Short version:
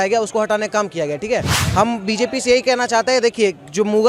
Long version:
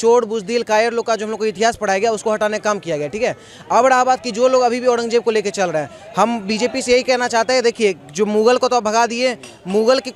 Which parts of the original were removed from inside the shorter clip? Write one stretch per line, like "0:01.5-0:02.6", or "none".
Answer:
0:03.5-0:06.0